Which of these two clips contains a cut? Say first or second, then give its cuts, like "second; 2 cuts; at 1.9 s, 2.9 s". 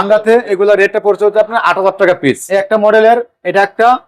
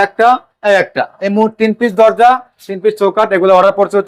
first; 1 cut; at 2.4 s